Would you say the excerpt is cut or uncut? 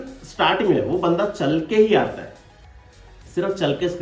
uncut